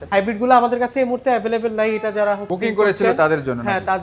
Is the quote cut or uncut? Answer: uncut